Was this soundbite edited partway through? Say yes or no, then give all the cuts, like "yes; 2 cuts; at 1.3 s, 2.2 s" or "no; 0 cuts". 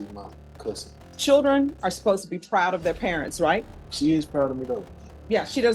yes; 2 cuts; at 1.1 s, 3.8 s